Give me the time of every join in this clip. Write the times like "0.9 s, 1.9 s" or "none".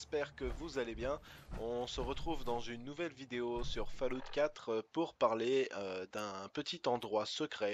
none